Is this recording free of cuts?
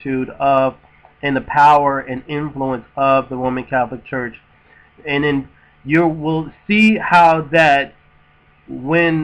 yes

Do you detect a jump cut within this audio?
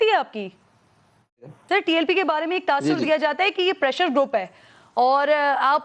yes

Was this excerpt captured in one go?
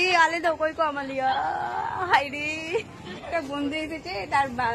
no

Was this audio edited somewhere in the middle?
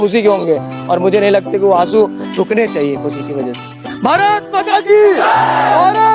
yes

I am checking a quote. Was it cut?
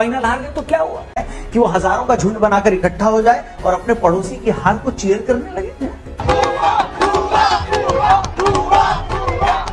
yes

